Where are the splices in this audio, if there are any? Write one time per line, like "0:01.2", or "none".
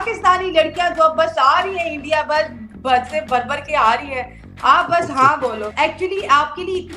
0:05.7